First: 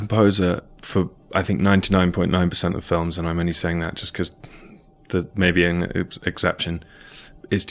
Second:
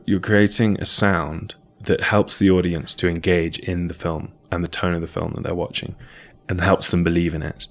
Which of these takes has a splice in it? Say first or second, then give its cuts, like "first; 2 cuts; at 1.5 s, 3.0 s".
first; 1 cut; at 1.2 s